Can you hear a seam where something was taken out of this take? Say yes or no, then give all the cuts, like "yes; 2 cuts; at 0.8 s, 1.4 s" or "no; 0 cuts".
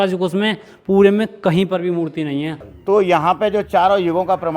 yes; 1 cut; at 2.6 s